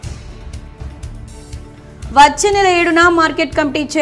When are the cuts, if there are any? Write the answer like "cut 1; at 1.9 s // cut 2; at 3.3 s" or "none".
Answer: none